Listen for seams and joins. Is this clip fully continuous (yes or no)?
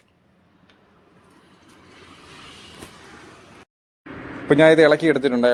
yes